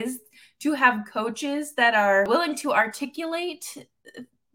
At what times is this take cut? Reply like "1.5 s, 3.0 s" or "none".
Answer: 2.3 s